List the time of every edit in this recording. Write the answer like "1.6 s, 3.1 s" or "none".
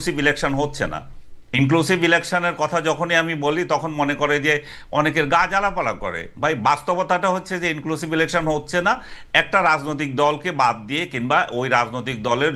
none

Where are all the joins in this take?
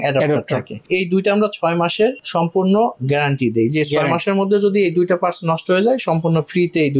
none

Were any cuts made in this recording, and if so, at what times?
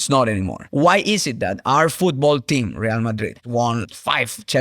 3.4 s

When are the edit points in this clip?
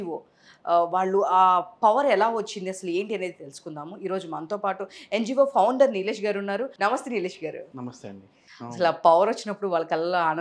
6.7 s, 8.4 s

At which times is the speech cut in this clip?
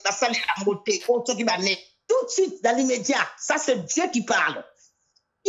1.9 s

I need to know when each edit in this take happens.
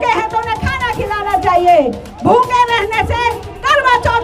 none

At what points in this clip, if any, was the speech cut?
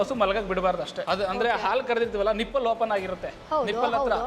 1.0 s

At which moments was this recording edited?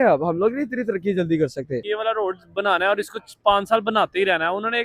1.8 s

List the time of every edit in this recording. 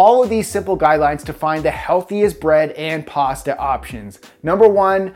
none

